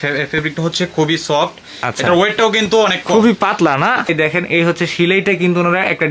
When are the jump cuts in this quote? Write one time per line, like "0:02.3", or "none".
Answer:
0:04.1